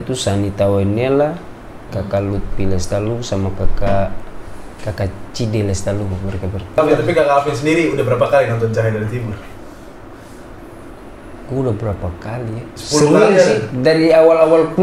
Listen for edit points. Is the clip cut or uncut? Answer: cut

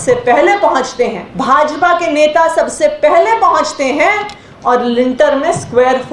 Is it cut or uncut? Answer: cut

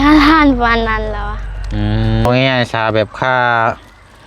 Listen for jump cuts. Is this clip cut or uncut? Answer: cut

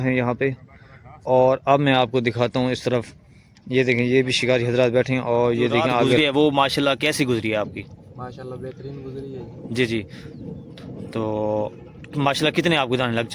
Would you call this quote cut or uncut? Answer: cut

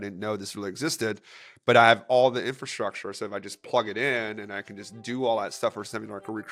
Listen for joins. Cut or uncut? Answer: uncut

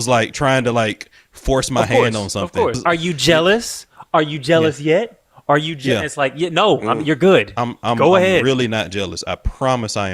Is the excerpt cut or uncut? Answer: cut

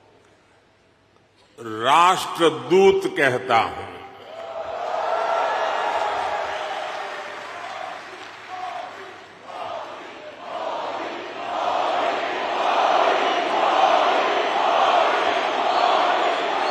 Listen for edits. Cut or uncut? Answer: uncut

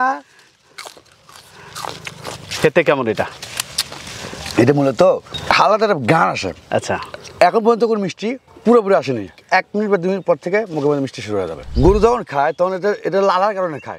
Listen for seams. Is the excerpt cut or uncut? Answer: cut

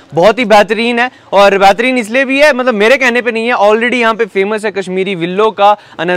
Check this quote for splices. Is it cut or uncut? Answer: uncut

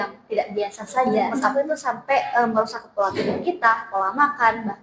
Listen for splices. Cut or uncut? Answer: cut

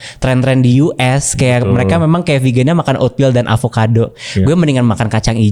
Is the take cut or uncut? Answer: uncut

